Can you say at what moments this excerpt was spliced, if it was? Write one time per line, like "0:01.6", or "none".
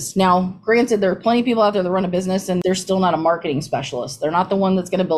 0:02.6